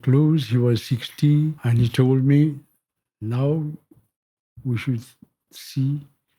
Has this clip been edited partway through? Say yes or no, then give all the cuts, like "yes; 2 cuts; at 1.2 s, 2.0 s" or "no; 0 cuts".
yes; 1 cut; at 1.6 s